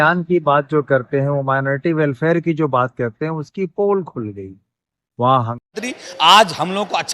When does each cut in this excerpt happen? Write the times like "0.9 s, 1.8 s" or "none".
5.7 s